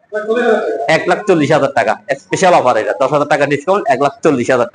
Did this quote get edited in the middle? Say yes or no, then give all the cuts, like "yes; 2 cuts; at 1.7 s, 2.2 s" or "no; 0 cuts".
no; 0 cuts